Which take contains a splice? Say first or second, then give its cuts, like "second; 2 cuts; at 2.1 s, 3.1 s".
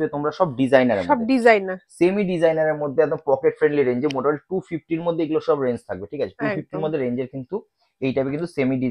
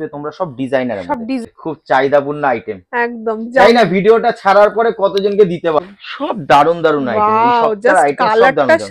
second; 2 cuts; at 1.4 s, 5.8 s